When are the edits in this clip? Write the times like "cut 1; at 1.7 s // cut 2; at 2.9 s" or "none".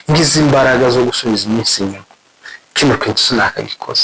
none